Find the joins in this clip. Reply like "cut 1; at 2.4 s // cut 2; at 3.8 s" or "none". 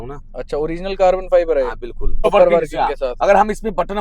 cut 1; at 2.2 s